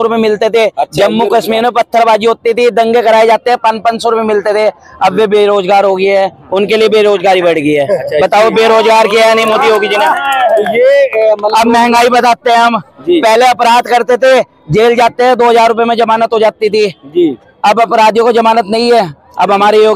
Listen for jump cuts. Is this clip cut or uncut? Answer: uncut